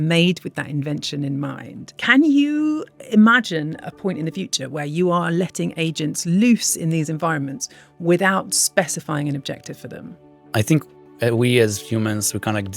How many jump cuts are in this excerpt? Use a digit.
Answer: 2